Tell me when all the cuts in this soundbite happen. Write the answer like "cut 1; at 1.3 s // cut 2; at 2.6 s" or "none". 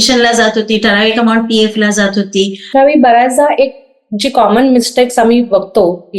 cut 1; at 2.7 s